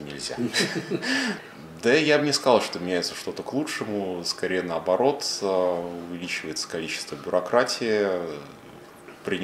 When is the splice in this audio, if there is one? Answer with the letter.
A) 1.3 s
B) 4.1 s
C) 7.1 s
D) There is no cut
A